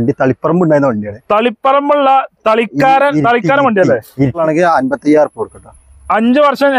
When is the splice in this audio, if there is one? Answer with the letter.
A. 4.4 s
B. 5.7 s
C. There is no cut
A